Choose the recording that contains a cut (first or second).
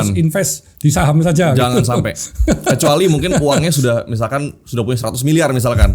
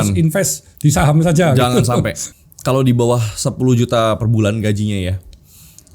second